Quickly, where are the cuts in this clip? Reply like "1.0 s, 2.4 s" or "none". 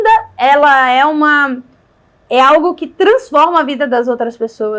none